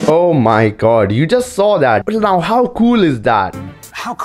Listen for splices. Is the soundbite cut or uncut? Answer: cut